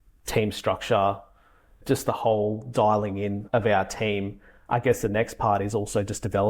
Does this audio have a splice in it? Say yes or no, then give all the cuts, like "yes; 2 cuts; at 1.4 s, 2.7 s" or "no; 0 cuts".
yes; 3 cuts; at 1.8 s, 3.4 s, 4.5 s